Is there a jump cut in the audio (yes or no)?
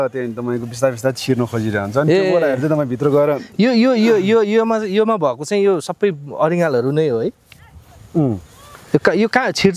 no